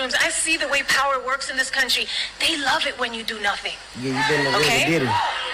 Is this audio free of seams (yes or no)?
yes